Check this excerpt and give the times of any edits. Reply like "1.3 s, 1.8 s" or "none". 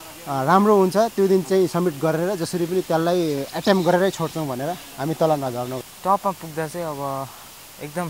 5.8 s